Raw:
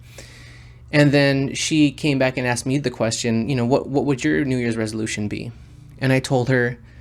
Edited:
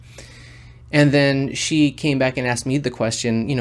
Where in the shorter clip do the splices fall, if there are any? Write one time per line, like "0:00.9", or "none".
none